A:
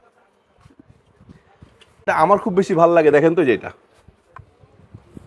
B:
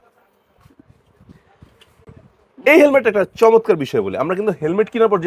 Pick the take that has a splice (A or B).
A